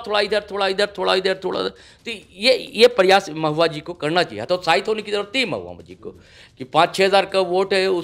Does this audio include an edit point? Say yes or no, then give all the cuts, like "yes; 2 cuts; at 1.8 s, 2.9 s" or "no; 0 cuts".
no; 0 cuts